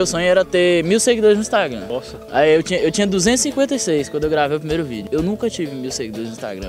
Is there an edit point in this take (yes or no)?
no